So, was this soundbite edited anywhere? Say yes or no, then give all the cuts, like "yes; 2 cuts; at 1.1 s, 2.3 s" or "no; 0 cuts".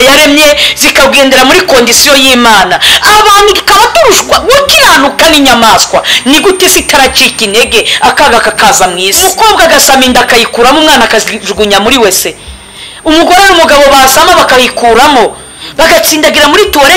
yes; 1 cut; at 9.2 s